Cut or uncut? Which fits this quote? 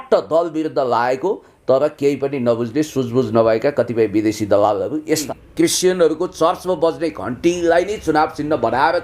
cut